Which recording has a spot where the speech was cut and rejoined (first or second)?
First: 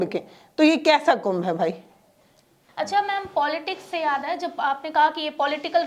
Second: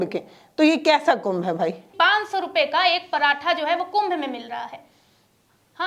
second